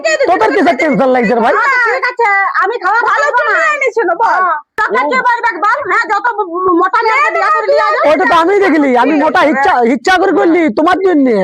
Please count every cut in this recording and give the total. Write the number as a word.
one